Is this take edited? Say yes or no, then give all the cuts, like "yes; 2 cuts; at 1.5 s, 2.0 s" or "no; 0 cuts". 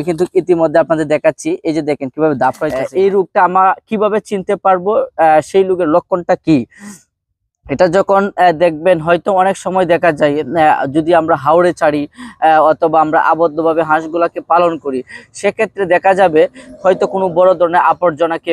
yes; 1 cut; at 2.7 s